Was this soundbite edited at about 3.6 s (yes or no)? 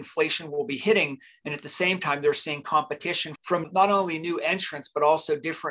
yes